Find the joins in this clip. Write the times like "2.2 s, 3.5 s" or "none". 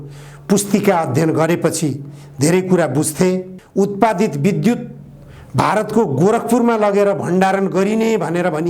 3.6 s